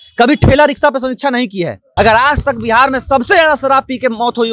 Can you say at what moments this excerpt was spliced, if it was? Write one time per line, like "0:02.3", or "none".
0:01.8